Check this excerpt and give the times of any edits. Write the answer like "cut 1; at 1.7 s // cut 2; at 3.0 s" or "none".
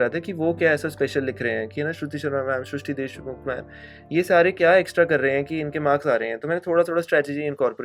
none